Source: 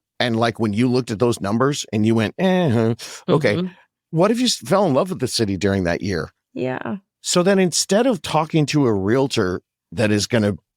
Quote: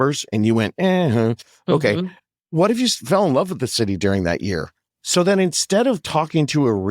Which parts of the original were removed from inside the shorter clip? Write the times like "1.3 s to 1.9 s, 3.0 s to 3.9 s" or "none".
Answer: 6.4 s to 7.0 s